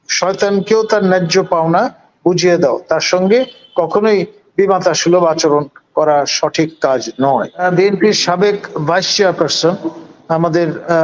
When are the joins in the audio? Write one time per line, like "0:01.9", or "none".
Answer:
0:07.6